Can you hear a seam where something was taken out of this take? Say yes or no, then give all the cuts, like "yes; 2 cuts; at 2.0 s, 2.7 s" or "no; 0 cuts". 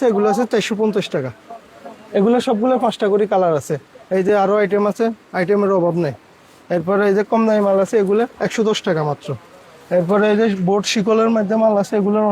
no; 0 cuts